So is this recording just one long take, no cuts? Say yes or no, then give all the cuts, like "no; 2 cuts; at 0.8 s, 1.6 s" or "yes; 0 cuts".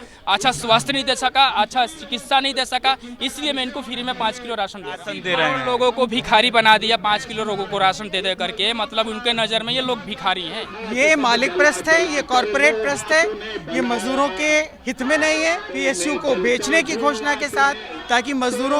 no; 4 cuts; at 5.2 s, 10.7 s, 15.7 s, 17.9 s